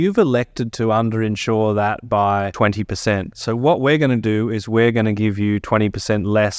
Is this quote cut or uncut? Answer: cut